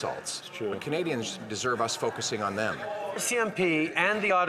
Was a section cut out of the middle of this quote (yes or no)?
yes